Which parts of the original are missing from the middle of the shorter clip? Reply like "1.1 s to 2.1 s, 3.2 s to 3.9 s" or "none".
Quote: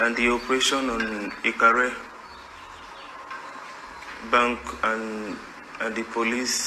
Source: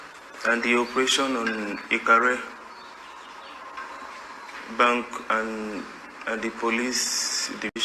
none